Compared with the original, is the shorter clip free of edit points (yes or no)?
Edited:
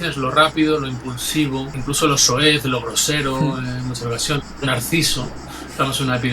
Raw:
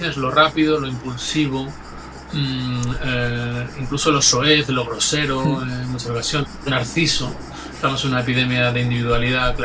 no